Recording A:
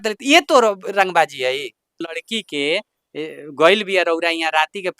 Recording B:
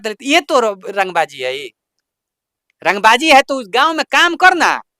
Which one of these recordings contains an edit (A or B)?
A